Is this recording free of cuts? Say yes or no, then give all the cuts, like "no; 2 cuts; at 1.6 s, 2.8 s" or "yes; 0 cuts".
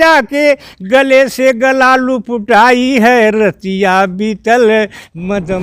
yes; 0 cuts